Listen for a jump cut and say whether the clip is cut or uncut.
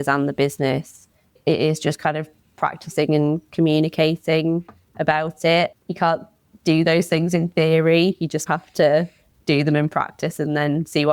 cut